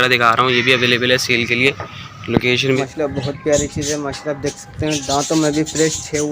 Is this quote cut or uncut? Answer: cut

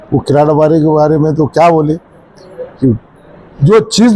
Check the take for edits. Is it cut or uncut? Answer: uncut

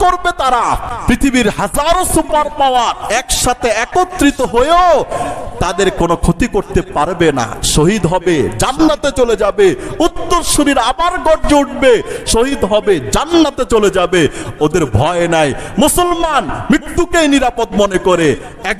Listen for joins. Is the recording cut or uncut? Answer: cut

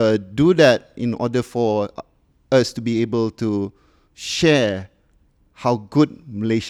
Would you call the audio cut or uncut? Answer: uncut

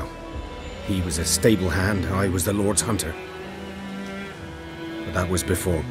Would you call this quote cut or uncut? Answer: uncut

